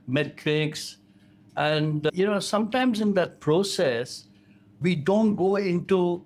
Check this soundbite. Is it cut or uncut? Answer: uncut